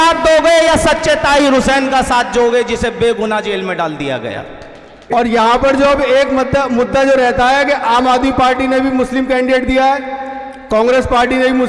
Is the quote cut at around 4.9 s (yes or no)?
yes